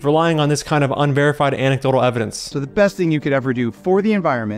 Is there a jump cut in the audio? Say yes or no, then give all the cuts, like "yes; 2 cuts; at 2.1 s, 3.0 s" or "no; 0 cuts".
yes; 1 cut; at 2.4 s